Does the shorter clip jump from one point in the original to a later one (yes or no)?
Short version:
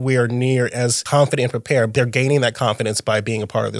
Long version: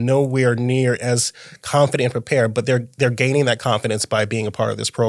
yes